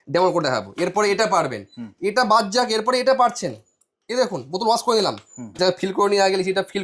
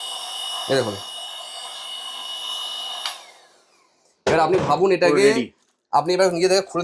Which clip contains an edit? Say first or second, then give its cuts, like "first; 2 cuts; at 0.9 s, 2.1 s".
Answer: first; 1 cut; at 5.4 s